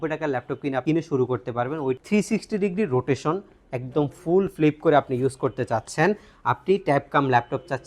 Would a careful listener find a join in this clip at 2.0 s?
yes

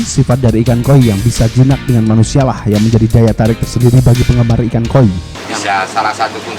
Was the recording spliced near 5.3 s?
yes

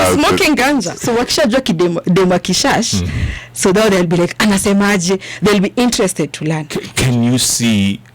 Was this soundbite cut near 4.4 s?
no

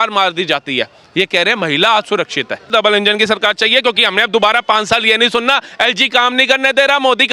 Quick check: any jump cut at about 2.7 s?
yes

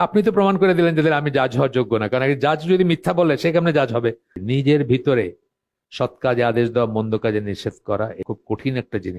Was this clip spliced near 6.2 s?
no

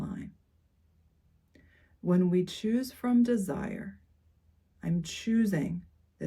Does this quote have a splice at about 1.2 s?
yes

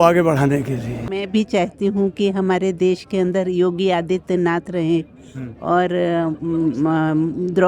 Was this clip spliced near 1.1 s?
yes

